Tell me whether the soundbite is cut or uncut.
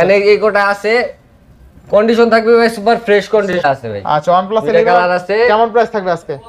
cut